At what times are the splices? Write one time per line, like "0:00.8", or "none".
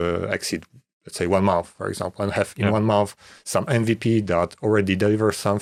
none